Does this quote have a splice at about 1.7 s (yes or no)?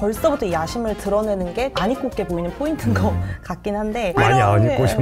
no